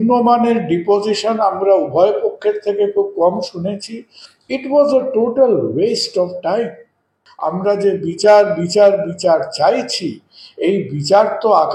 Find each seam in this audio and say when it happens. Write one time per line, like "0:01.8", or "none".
0:07.2